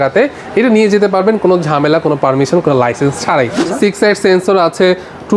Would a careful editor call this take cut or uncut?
cut